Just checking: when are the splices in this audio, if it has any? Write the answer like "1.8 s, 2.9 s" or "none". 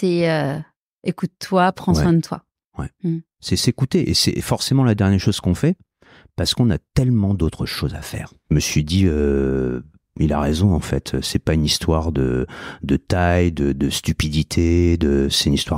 8.4 s